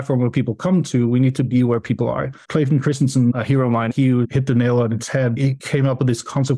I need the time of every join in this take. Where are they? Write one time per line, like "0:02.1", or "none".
0:02.4
0:03.8
0:05.5